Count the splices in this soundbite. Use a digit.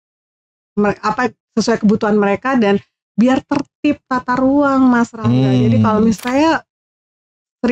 1